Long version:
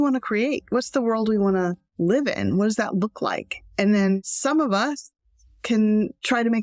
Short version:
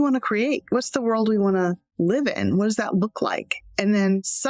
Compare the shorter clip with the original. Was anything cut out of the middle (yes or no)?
no